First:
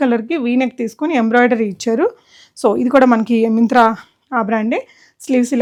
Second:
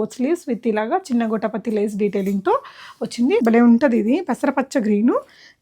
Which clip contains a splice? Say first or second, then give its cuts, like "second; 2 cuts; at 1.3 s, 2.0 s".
second; 1 cut; at 3.4 s